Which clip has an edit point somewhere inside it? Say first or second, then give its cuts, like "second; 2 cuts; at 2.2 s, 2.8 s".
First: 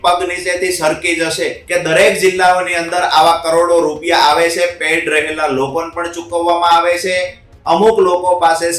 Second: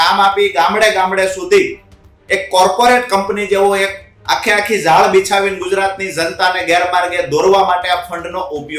first; 1 cut; at 1.6 s